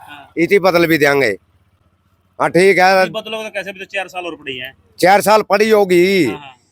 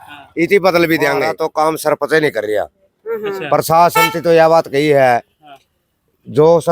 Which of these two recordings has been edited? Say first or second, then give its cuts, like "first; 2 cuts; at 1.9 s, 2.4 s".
second; 1 cut; at 1.3 s